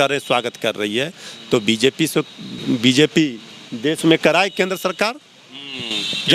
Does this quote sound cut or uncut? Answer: uncut